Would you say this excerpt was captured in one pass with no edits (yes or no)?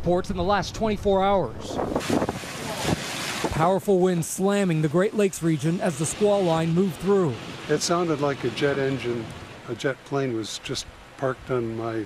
yes